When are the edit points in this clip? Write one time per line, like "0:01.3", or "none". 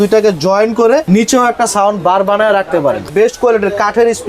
0:01.0
0:03.1